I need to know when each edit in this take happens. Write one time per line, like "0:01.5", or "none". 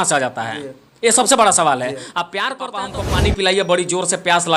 0:02.9